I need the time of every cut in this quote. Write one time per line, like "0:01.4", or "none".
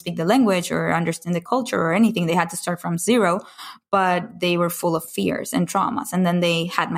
0:01.4